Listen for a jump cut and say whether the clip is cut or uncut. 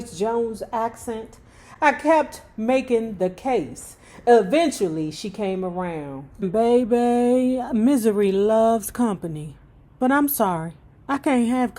cut